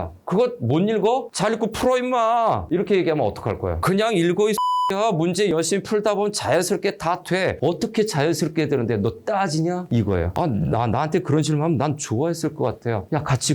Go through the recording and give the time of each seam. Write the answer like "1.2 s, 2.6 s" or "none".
3.8 s